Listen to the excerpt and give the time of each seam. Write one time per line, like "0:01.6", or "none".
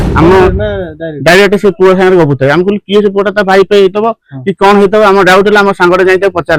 none